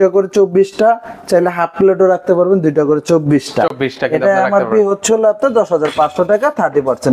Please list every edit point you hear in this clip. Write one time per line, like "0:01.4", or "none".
none